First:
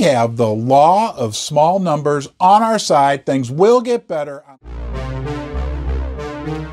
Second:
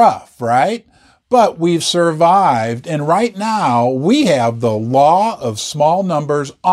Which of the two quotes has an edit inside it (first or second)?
first